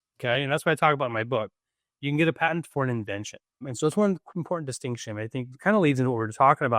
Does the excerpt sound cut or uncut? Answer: cut